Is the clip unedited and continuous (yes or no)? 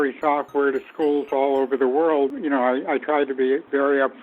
no